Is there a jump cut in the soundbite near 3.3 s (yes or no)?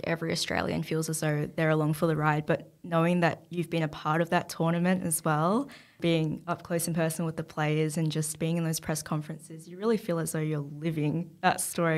no